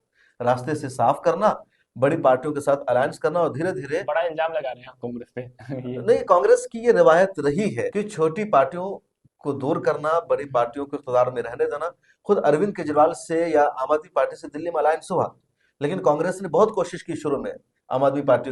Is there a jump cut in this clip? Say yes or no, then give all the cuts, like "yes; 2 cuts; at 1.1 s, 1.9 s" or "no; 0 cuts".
no; 0 cuts